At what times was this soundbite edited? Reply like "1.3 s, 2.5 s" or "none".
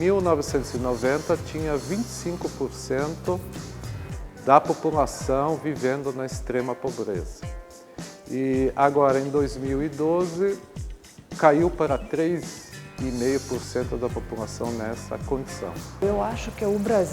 15.8 s